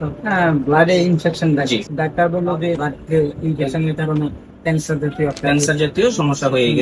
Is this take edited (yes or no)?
yes